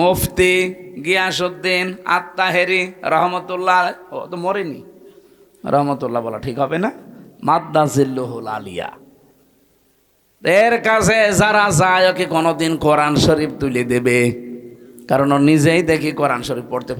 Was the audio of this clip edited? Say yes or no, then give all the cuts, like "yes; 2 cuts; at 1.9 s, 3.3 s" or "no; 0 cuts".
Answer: no; 0 cuts